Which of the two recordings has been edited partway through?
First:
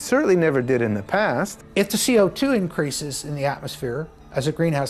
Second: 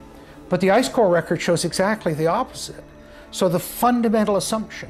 first; 1 cut; at 1.6 s

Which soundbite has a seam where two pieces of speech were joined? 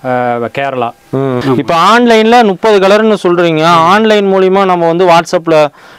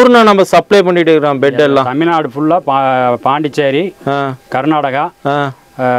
first; 1 cut; at 1.4 s

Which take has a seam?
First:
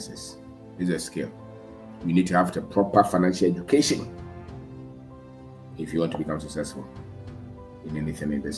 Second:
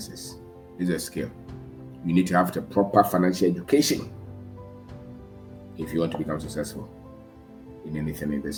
first; 2 cuts; at 4.1 s, 5.8 s

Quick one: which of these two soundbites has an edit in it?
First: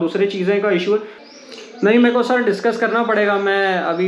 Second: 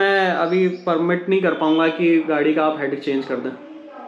first; 1 cut; at 1.1 s

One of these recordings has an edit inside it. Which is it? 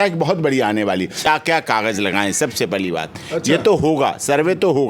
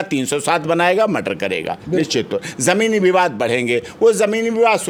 first; 1 cut; at 1.3 s

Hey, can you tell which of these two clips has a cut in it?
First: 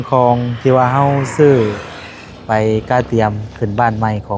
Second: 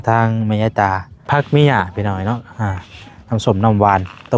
second; 1 cut; at 1.3 s

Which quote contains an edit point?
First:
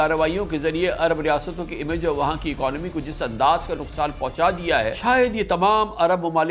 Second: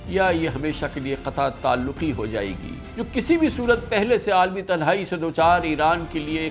first; 1 cut; at 5.0 s

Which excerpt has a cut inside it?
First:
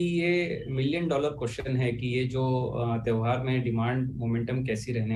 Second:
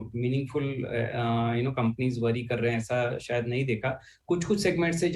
second; 1 cut; at 2.0 s

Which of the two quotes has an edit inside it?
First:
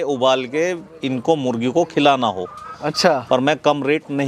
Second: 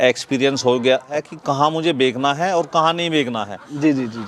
second; 1 cut; at 1.1 s

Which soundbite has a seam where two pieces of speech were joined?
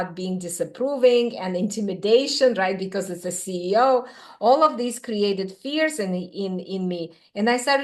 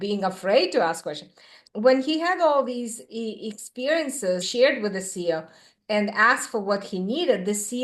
second; 3 cuts; at 1.6 s, 4.5 s, 5.7 s

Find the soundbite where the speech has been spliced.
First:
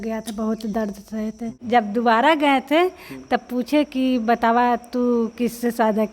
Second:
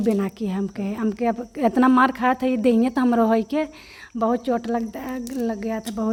first; 1 cut; at 1.6 s

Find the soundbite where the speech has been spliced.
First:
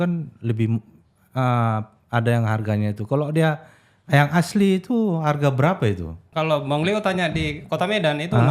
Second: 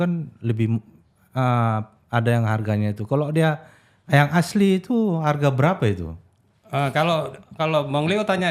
first; 1 cut; at 6.2 s

